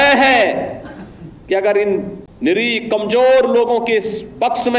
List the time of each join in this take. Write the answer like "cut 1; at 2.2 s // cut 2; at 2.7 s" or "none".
cut 1; at 2.2 s